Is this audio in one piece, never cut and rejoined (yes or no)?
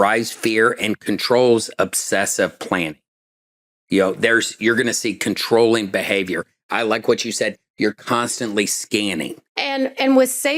no